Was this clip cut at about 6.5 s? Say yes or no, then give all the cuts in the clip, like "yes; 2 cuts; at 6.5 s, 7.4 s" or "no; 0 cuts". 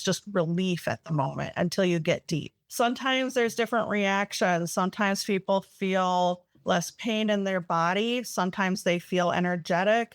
no; 1 cut; at 2.6 s